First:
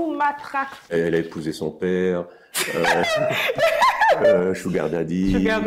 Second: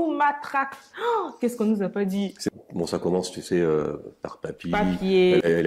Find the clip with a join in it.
first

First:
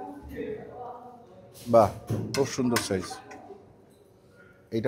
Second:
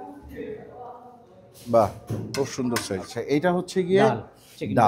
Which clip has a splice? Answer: second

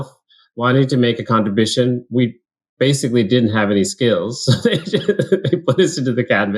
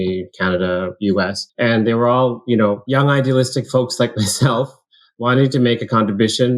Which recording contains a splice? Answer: second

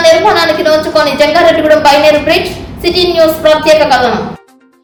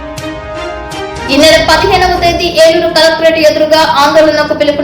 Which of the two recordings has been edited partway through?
second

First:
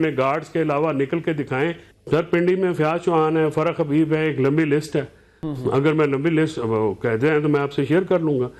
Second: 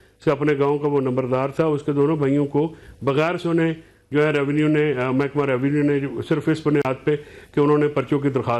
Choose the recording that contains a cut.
first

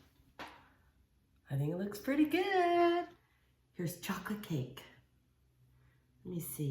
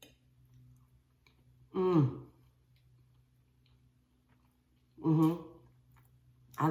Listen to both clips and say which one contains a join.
first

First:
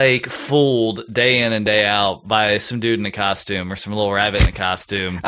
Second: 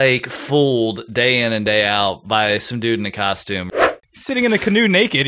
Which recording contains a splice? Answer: second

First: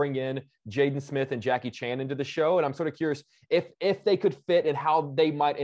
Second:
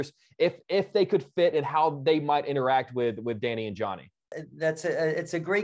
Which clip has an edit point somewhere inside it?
second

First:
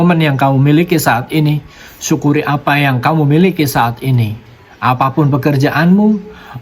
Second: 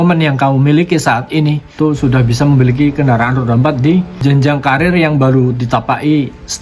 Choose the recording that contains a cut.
second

